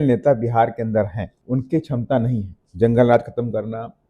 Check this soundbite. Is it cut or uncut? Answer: cut